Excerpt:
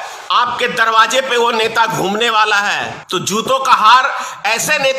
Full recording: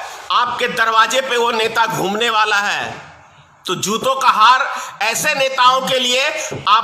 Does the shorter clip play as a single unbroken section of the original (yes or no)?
no